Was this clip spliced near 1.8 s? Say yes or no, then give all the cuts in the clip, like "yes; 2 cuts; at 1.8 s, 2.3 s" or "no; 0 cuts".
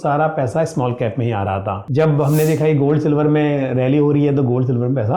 yes; 1 cut; at 1.8 s